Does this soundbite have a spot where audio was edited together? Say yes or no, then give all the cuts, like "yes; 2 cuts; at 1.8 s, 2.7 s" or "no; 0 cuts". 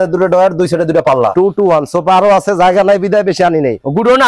yes; 1 cut; at 1.3 s